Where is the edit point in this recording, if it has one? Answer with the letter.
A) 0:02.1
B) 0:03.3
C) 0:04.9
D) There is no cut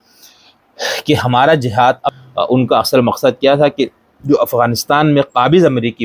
A